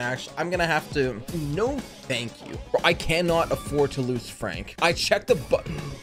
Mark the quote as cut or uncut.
cut